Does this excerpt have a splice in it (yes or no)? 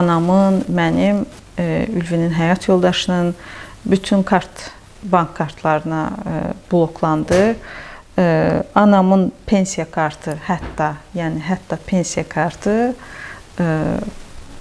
no